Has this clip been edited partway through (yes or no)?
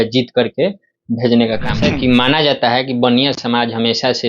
yes